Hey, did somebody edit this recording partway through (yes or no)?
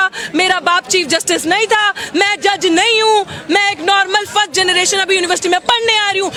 no